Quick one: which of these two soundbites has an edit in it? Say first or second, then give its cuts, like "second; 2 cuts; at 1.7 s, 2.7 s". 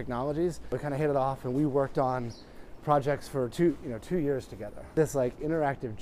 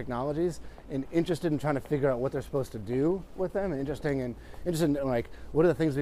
first; 2 cuts; at 0.8 s, 4.9 s